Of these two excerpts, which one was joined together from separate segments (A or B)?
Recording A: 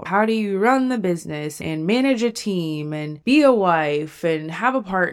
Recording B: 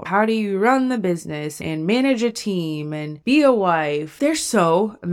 B